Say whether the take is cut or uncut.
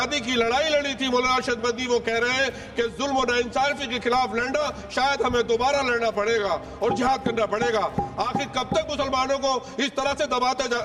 uncut